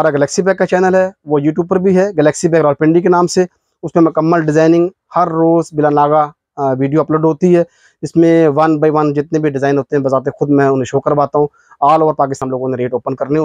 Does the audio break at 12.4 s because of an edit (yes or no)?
yes